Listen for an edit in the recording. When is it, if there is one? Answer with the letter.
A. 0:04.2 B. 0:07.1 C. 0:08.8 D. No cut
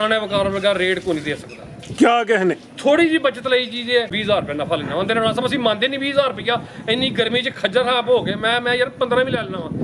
A